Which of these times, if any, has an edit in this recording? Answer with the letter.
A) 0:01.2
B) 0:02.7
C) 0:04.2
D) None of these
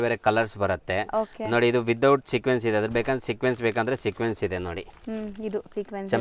D